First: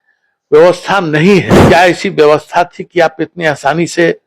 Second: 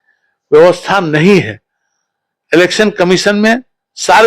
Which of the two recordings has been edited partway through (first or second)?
first